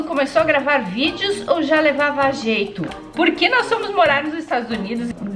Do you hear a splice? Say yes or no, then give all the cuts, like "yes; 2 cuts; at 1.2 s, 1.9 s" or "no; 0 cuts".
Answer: yes; 1 cut; at 3.0 s